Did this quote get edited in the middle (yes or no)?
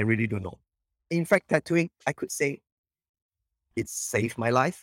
yes